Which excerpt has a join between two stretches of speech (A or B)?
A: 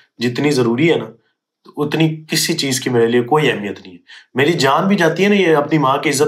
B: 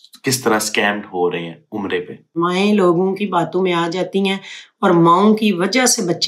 B